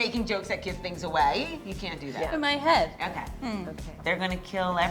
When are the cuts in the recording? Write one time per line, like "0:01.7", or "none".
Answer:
0:04.0